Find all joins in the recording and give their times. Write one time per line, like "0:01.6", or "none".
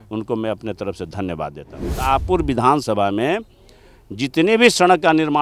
0:01.5